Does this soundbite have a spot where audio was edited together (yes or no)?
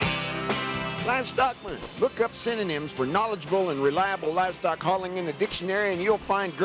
yes